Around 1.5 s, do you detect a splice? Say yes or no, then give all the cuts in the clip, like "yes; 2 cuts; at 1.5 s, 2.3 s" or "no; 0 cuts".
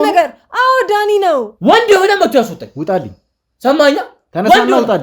yes; 1 cut; at 1.5 s